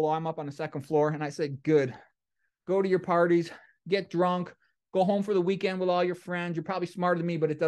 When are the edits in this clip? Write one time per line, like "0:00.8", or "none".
none